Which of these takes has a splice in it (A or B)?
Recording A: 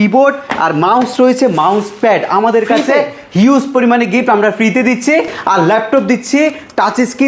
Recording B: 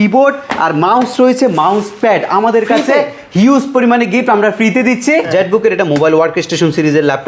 B